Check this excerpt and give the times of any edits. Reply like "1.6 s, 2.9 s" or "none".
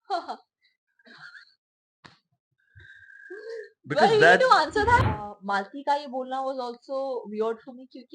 5.0 s